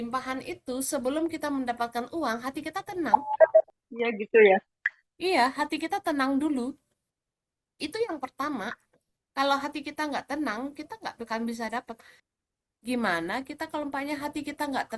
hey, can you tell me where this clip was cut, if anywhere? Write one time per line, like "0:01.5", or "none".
0:03.8

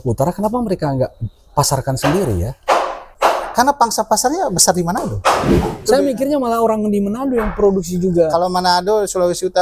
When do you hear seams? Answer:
0:03.0
0:05.8

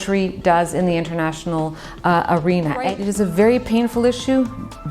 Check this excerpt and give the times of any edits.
0:02.8

